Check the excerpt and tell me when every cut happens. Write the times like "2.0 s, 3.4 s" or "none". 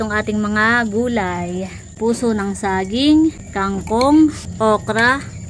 1.9 s, 3.5 s, 4.4 s